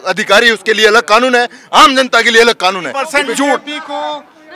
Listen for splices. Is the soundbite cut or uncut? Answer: cut